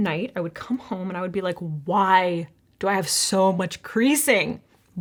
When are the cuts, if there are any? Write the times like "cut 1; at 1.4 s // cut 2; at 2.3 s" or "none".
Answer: none